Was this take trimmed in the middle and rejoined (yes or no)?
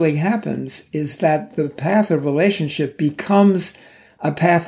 no